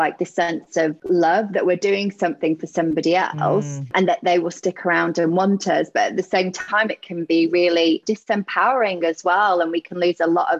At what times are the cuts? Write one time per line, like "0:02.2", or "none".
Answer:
0:01.0
0:08.0